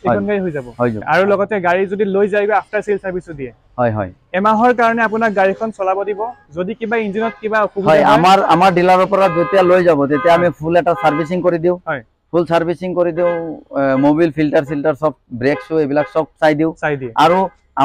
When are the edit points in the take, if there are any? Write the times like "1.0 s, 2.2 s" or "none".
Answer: 1.0 s